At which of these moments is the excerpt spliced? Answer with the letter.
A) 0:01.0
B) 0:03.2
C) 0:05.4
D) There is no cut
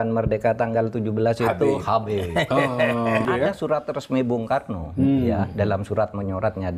B